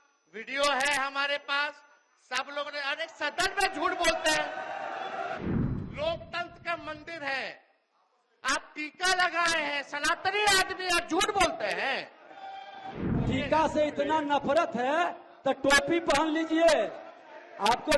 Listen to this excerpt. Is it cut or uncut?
cut